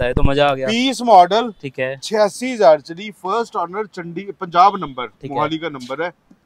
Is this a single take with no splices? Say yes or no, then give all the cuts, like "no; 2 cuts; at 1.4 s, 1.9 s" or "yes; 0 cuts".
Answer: yes; 0 cuts